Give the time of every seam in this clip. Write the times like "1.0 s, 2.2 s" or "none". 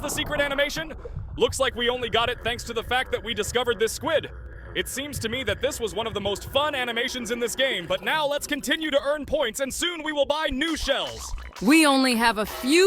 none